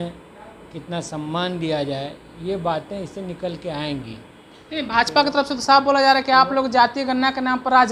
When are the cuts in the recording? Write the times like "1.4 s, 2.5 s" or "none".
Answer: none